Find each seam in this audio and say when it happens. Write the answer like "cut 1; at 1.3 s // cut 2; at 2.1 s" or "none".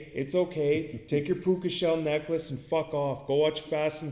none